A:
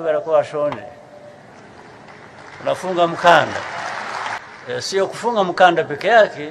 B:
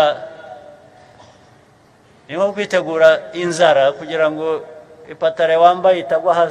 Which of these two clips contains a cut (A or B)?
A